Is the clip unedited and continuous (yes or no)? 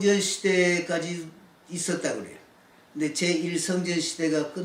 yes